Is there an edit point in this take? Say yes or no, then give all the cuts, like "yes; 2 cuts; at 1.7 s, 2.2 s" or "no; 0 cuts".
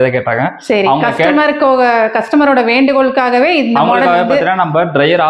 no; 0 cuts